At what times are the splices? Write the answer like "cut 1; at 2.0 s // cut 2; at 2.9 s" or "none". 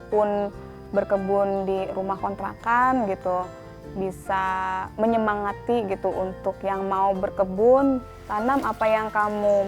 cut 1; at 8.2 s